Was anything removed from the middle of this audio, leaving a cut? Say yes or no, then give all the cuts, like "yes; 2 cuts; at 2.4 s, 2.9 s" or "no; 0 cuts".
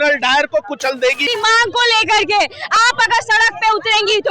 yes; 1 cut; at 1.2 s